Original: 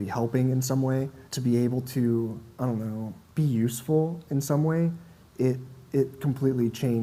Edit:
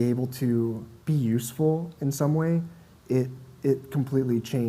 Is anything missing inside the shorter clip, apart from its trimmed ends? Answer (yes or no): yes